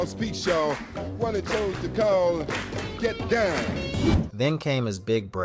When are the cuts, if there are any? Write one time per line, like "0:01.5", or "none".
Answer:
none